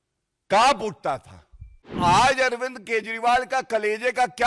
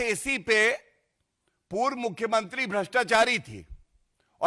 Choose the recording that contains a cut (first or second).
first